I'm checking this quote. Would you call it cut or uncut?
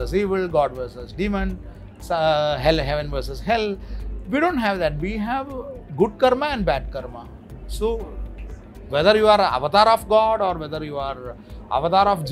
uncut